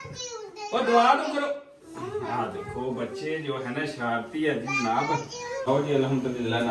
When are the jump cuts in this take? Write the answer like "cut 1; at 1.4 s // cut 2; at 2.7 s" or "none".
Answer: cut 1; at 5.6 s

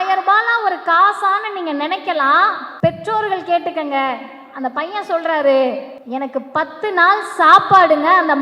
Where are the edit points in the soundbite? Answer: cut 1; at 2.6 s // cut 2; at 5.9 s

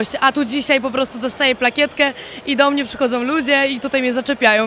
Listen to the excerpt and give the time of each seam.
none

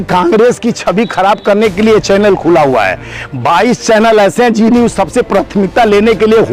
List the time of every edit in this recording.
none

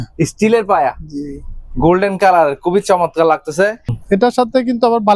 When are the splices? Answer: cut 1; at 4.0 s

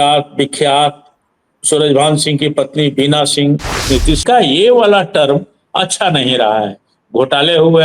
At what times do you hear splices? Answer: cut 1; at 4.2 s

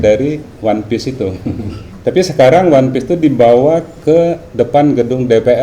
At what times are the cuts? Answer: cut 1; at 1.8 s

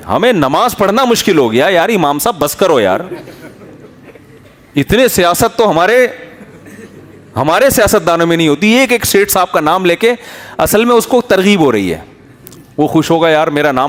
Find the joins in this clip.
none

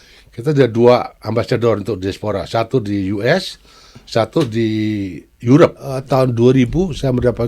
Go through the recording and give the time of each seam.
cut 1; at 5.9 s

